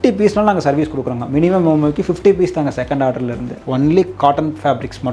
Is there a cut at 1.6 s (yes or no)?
no